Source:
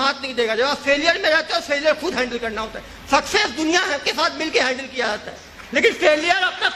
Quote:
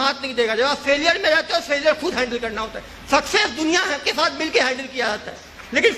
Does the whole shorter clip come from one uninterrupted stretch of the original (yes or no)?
yes